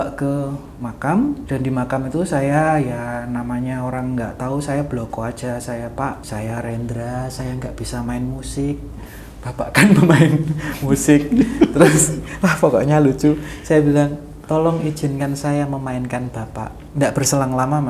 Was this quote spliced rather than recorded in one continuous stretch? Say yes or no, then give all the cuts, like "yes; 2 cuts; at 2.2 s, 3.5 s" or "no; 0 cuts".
yes; 3 cuts; at 1.4 s, 6.2 s, 16.8 s